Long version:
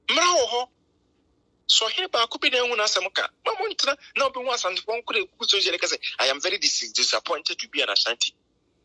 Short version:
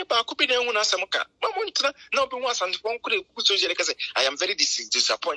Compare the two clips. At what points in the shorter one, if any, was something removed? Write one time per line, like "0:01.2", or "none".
none